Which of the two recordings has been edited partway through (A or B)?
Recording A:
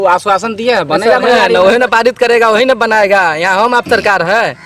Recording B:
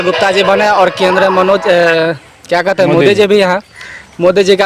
A